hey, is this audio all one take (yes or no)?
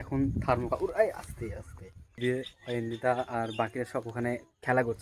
no